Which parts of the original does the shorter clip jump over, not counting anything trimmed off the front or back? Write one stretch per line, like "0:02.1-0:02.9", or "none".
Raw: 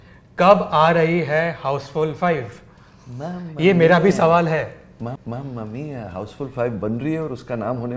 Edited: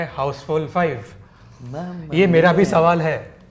none